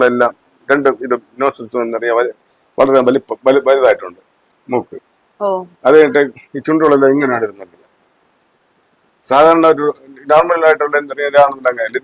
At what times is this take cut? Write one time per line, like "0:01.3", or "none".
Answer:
none